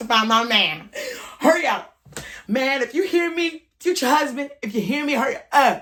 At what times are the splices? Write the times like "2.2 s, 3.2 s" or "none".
none